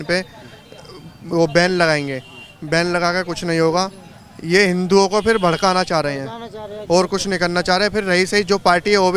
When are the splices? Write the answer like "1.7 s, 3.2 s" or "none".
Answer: none